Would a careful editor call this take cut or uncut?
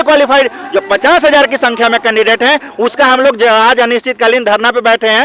uncut